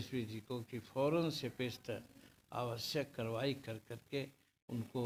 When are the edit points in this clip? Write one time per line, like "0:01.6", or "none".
none